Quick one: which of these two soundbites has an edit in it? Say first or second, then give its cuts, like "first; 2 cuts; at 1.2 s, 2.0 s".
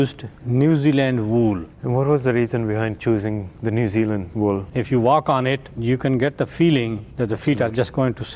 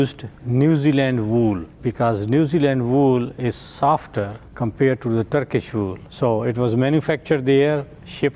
first; 5 cuts; at 1.7 s, 3.5 s, 4.6 s, 5.7 s, 7.1 s